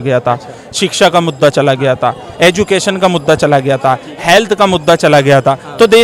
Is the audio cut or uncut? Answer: uncut